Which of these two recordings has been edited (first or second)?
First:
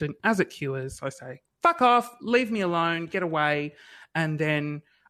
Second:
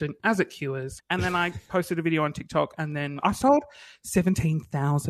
second